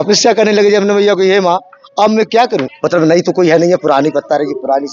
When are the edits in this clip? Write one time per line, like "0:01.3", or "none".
0:02.7